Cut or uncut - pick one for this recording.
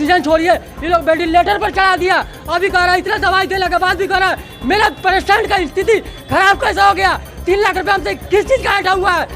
uncut